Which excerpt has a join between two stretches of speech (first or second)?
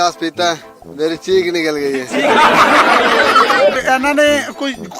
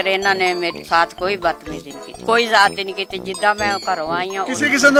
first